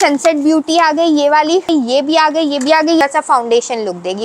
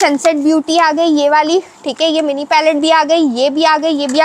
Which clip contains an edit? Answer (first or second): first